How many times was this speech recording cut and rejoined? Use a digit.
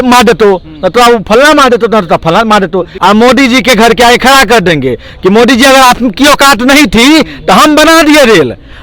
1